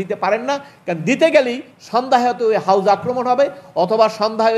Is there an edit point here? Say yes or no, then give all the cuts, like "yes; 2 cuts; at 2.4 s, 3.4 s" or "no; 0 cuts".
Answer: no; 0 cuts